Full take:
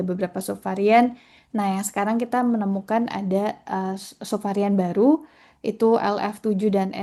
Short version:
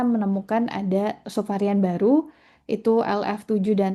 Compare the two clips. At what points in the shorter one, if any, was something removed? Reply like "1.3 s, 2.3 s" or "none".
1.2 s